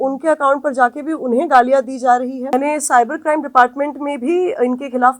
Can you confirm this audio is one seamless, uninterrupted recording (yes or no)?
no